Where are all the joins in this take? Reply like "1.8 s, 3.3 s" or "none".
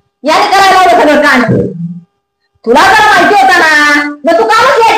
none